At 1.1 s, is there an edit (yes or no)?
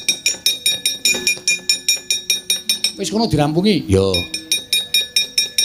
yes